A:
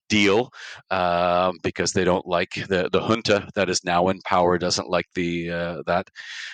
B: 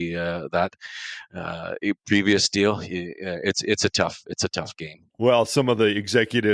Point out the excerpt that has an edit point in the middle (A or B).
B